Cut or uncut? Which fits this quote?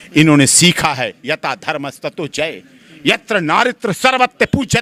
uncut